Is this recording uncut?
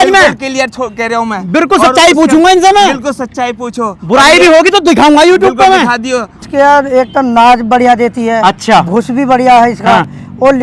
no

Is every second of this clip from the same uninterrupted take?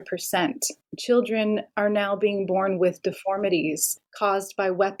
yes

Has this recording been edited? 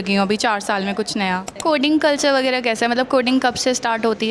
yes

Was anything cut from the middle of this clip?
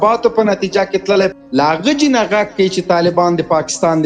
yes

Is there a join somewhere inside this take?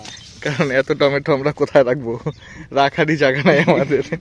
no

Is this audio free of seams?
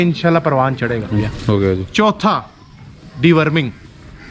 no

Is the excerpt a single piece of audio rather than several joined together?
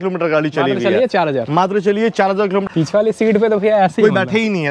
no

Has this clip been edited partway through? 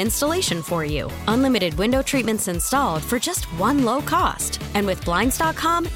no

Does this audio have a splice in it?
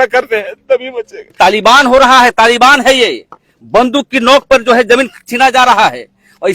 yes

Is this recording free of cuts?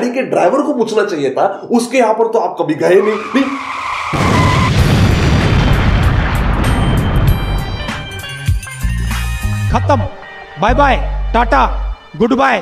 yes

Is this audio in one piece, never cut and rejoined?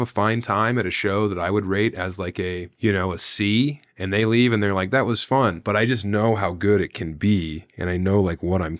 no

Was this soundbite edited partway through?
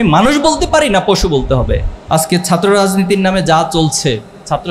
yes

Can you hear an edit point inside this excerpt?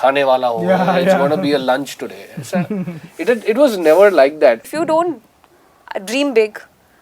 yes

